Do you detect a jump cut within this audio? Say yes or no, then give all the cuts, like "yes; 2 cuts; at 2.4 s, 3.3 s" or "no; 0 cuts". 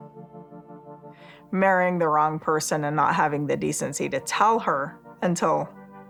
no; 0 cuts